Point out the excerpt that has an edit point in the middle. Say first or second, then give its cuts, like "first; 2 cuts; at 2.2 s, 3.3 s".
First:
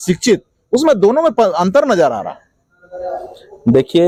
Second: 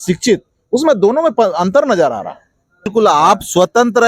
second; 1 cut; at 2.9 s